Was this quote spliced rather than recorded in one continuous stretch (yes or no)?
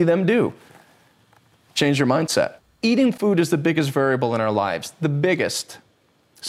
yes